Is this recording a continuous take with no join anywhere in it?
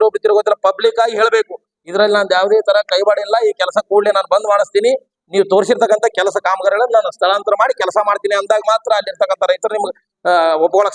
yes; 0 cuts

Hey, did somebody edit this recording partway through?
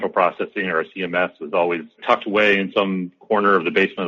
yes; 1 cut; at 1.9 s

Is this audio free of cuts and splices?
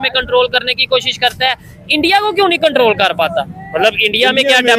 yes; 0 cuts

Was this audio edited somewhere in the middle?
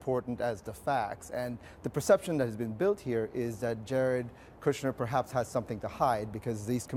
no; 0 cuts

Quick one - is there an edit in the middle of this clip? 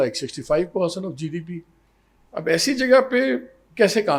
no; 0 cuts

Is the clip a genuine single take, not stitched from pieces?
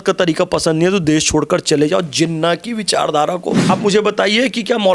no; 1 cut; at 3.6 s

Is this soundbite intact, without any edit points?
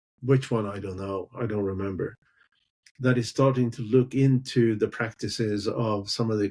yes; 0 cuts

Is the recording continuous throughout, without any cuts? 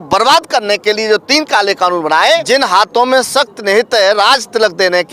no; 1 cut; at 2.4 s

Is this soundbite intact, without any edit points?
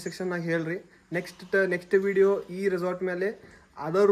yes; 0 cuts

